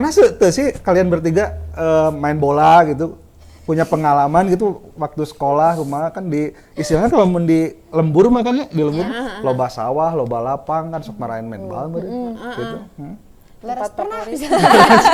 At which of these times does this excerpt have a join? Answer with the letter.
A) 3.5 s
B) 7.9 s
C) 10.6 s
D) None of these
D